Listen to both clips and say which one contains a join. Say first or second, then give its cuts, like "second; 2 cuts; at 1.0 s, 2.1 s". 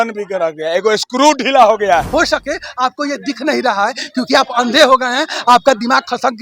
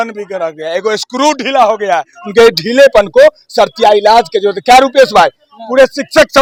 first; 1 cut; at 2.1 s